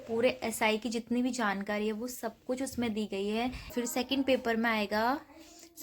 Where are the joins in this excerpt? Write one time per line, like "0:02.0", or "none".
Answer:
0:03.7